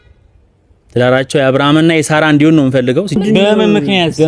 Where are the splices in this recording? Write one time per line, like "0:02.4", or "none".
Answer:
0:03.2